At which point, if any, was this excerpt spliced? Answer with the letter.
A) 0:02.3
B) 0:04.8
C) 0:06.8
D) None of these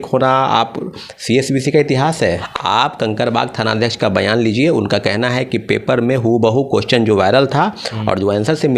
A